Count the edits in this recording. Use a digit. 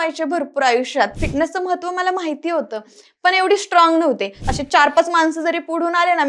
2